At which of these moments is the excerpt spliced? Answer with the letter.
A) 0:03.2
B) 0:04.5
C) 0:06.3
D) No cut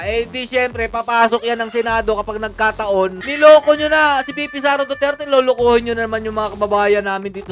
A